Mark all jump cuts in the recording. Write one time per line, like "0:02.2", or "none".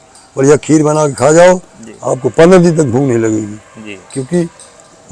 none